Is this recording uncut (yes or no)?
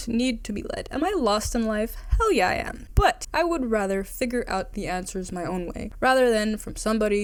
yes